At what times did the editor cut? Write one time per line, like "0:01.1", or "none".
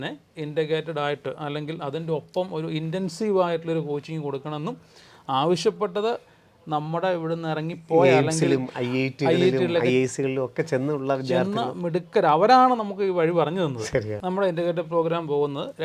0:14.2